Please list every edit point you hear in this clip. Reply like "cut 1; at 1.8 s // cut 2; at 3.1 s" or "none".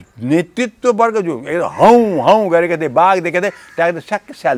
none

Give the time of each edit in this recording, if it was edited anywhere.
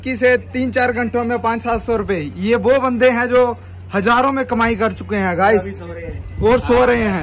none

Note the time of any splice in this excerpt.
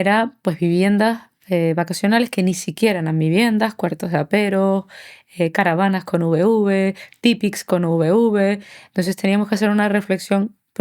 none

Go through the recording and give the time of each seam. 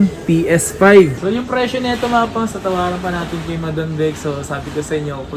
cut 1; at 1.1 s

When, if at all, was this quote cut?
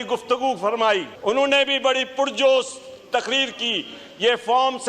cut 1; at 1.1 s

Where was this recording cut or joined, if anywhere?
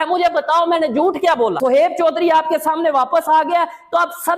cut 1; at 1.6 s

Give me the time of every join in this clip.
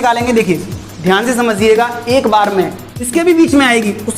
cut 1; at 3.1 s

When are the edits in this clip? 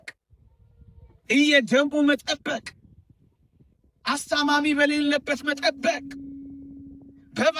none

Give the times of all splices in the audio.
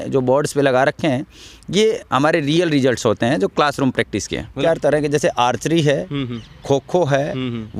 cut 1; at 4.6 s

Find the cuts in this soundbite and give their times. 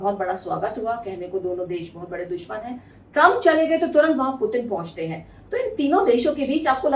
none

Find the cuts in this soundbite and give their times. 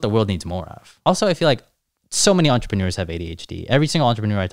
cut 1; at 1.0 s

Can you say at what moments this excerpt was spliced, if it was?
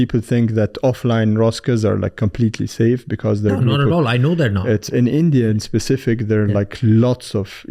none

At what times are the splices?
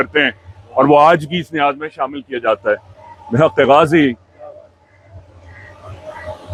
none

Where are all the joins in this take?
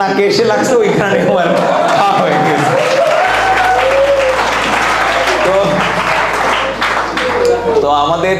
none

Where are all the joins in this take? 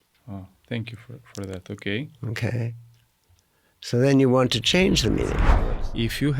cut 1; at 5.5 s

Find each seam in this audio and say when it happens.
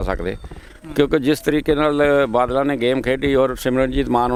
none

